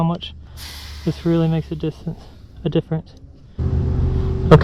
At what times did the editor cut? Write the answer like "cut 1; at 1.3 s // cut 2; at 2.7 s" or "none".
cut 1; at 3.7 s